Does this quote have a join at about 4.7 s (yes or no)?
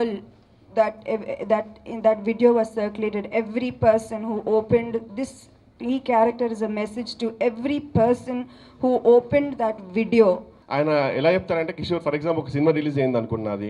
no